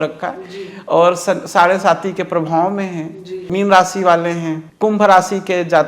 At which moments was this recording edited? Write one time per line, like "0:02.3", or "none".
0:03.5
0:04.6